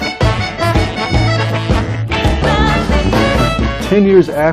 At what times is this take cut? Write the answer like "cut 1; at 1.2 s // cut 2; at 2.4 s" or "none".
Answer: none